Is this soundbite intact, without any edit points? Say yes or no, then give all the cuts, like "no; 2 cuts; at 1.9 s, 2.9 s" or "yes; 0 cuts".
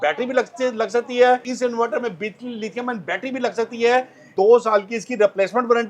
no; 2 cuts; at 1.5 s, 4.3 s